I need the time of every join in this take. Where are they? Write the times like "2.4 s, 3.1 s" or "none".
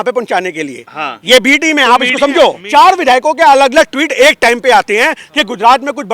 2.6 s

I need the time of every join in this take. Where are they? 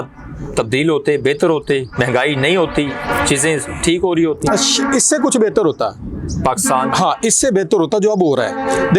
none

